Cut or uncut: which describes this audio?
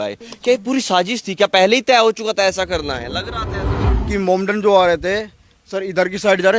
cut